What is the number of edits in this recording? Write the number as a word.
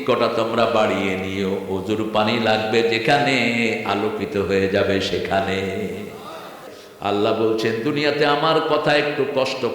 one